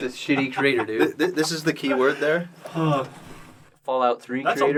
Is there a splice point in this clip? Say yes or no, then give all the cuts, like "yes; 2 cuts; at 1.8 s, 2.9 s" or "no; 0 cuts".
no; 0 cuts